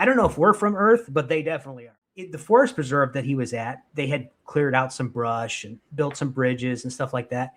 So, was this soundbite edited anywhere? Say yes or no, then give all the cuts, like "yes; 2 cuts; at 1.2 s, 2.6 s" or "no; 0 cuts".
yes; 1 cut; at 1.9 s